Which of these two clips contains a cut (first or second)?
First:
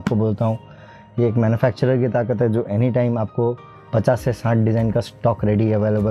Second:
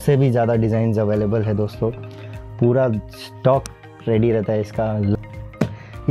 second